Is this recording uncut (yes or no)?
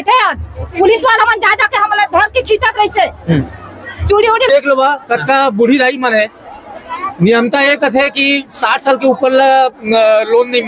no